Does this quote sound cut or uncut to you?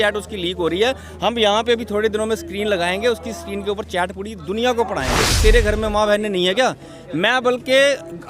cut